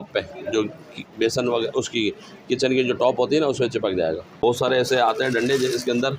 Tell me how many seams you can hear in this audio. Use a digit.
1